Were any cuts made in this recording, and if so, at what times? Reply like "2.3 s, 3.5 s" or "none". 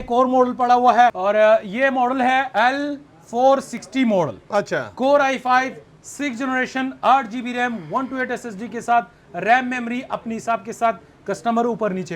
1.2 s, 2.5 s